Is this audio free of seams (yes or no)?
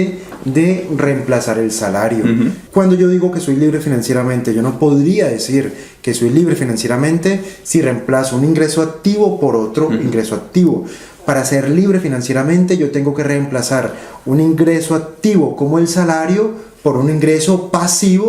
no